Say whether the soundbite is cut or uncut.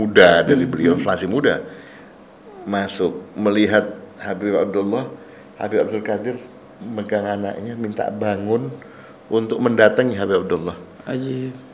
uncut